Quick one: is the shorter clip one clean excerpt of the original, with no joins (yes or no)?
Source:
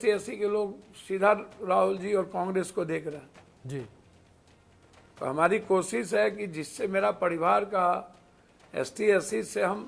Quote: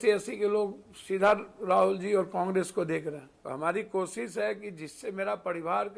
no